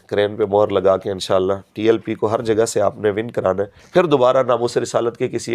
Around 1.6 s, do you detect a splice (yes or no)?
no